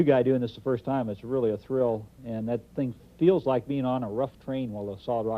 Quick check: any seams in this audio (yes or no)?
yes